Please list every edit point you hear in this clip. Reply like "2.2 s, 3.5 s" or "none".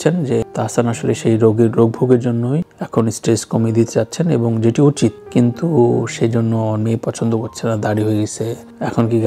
none